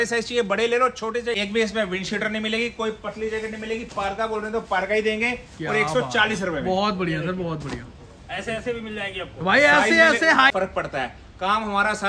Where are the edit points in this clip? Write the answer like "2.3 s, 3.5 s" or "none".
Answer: 1.4 s, 10.5 s